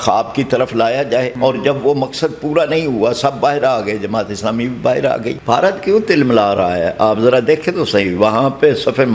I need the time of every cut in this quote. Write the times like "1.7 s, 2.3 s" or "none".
1.3 s, 5.4 s